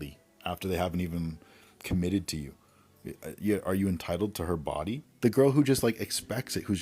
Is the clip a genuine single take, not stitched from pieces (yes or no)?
no